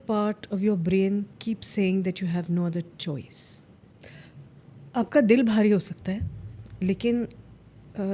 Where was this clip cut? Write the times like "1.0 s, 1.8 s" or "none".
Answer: 1.3 s, 3.9 s